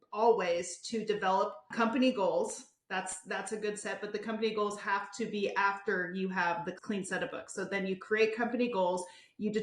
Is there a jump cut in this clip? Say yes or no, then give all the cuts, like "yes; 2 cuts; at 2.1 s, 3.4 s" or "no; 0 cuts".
yes; 2 cuts; at 1.7 s, 6.8 s